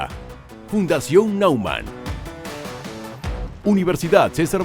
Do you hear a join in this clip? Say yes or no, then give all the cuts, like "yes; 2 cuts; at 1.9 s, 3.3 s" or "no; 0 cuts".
yes; 1 cut; at 3.5 s